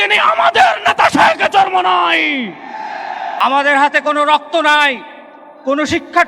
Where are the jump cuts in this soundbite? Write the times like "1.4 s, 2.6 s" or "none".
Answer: 3.4 s